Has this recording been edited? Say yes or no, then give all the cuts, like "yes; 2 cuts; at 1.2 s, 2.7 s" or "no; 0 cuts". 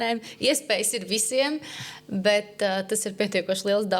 no; 0 cuts